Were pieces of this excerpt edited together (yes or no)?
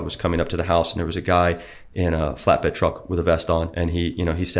yes